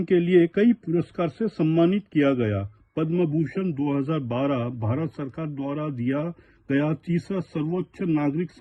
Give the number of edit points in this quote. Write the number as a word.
zero